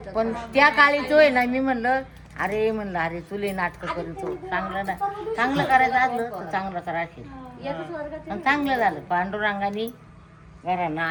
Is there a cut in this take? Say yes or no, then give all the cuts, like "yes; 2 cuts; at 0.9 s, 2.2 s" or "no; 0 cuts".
no; 0 cuts